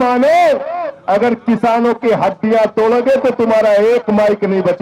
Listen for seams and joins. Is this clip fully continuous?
yes; 0 cuts

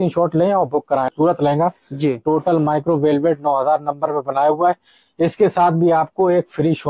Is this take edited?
yes; 1 cut; at 1.1 s

